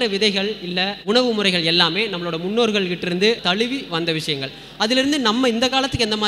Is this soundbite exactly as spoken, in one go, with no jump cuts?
no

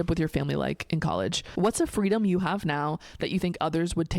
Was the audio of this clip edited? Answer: yes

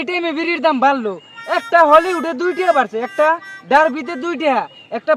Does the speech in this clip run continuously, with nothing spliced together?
yes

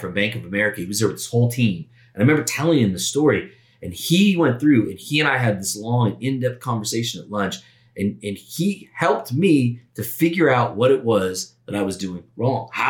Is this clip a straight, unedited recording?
yes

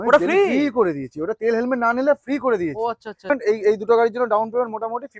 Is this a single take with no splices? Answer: no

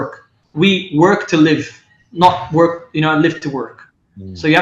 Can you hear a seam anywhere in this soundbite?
no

